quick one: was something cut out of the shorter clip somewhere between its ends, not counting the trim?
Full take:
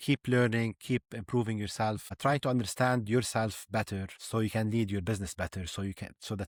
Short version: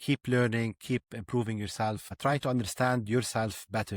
no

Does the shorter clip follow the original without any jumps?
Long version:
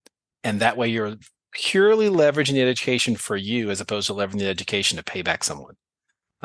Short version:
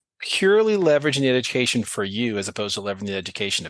yes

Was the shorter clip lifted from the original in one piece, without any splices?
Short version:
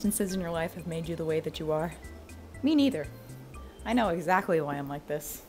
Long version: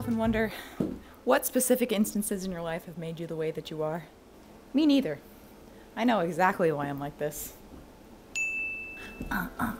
yes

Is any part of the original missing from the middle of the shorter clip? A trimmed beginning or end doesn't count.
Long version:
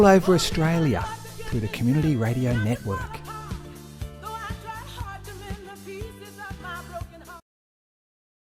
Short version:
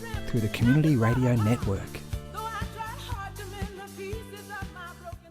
yes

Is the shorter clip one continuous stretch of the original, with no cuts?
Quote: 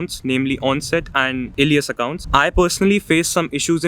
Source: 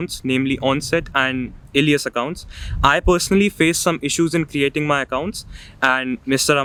no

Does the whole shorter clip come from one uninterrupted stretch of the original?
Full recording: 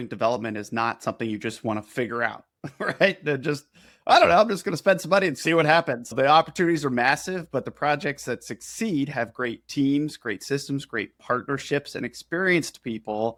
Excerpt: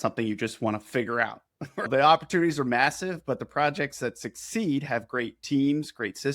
no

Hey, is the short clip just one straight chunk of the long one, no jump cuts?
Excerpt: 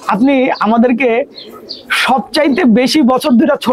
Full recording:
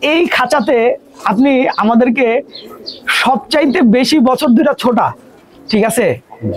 yes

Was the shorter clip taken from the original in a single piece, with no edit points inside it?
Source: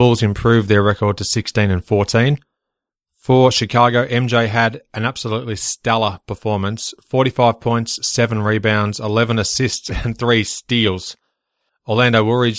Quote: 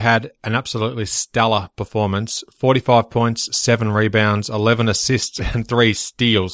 yes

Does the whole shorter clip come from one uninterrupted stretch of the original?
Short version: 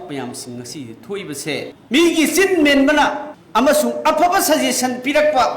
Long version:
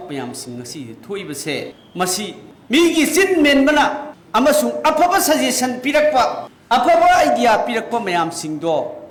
no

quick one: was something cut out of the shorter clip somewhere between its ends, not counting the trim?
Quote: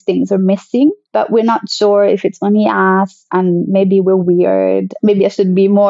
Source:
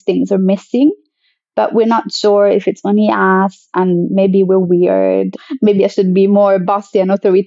yes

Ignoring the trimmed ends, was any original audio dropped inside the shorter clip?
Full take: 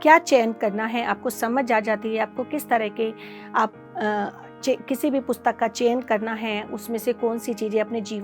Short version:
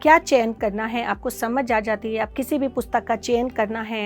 yes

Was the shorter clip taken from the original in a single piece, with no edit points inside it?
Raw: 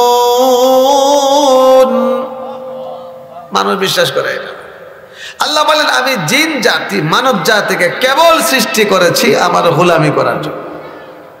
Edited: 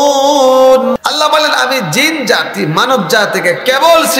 no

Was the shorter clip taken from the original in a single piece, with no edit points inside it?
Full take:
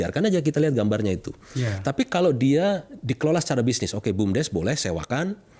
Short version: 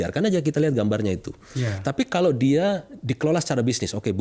yes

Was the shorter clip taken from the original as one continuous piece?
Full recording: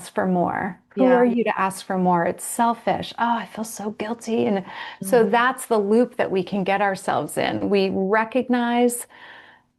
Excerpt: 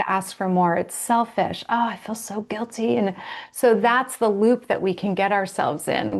yes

